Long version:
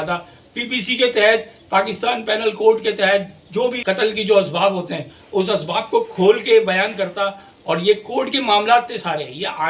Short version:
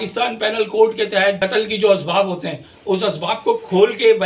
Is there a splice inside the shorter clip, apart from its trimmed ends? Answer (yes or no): yes